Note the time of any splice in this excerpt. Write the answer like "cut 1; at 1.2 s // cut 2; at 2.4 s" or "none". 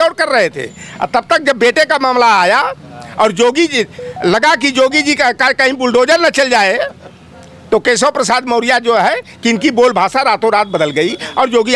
none